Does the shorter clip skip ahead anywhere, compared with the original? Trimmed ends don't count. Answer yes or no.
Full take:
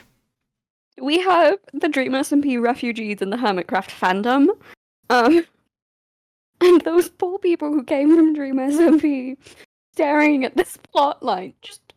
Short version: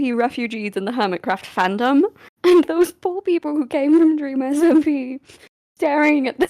yes